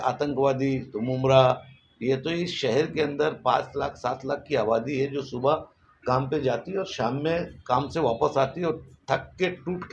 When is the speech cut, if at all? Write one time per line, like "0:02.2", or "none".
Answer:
none